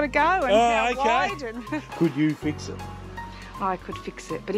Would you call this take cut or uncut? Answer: cut